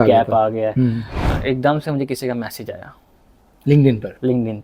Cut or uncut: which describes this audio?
cut